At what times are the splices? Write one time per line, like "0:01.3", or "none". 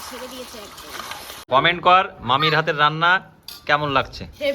0:01.5